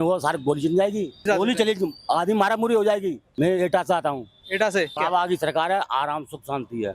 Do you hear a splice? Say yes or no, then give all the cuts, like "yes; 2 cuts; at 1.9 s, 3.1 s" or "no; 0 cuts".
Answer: no; 0 cuts